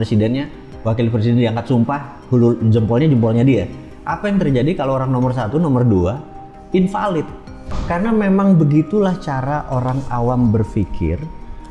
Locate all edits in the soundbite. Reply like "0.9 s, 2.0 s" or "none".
7.7 s